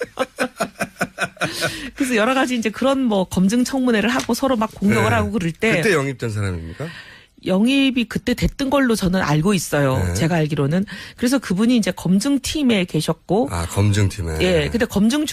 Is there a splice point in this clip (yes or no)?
no